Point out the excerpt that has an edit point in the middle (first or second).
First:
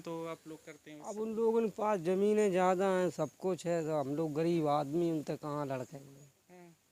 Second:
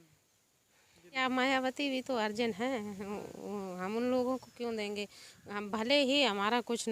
second